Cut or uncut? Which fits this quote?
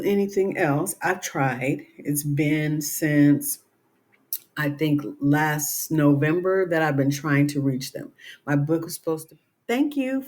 cut